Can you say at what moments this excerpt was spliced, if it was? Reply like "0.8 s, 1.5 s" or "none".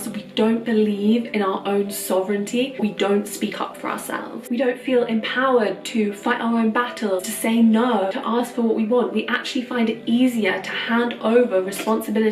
2.8 s, 4.3 s, 7.3 s, 8.2 s